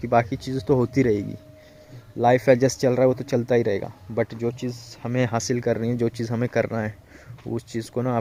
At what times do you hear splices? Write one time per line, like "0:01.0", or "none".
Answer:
none